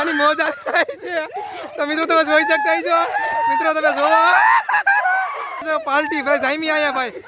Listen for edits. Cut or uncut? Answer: cut